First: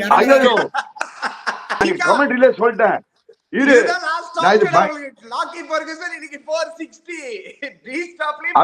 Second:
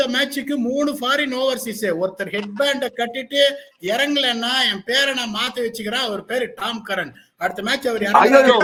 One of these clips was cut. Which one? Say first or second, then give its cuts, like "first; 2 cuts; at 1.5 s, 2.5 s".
first; 1 cut; at 1.8 s